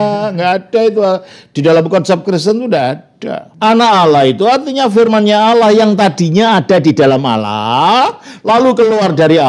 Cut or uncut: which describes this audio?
cut